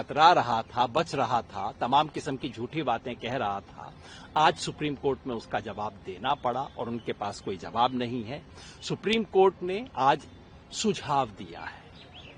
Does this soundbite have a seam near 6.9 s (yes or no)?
no